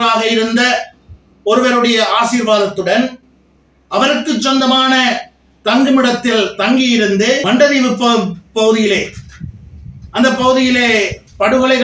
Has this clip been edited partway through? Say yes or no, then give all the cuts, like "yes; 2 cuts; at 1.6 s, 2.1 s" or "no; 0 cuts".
yes; 1 cut; at 7.4 s